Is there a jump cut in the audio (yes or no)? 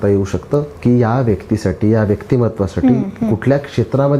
no